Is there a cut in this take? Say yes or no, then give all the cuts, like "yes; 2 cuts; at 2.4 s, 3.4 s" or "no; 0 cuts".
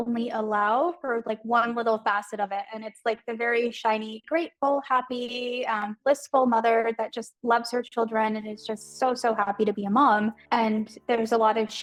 no; 0 cuts